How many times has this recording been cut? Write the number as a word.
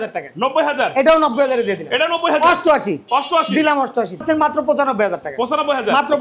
one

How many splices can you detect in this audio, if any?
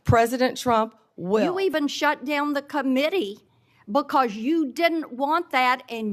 one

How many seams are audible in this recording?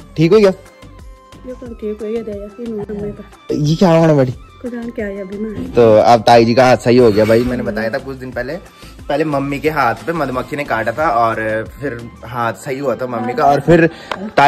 zero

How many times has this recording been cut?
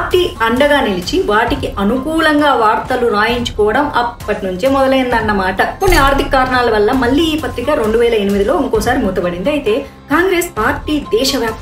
one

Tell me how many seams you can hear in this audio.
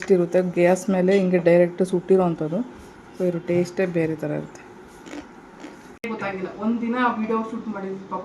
one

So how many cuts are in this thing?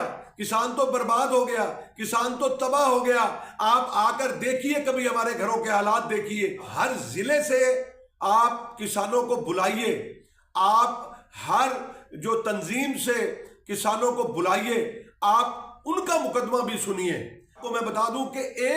two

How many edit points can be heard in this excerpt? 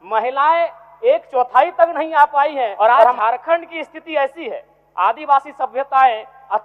one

